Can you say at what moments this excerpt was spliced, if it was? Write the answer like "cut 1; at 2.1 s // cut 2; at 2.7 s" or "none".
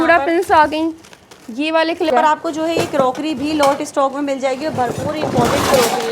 cut 1; at 2.1 s